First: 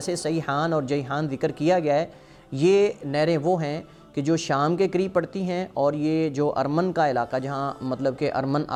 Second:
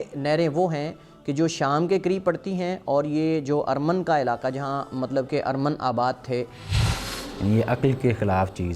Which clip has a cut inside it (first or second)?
second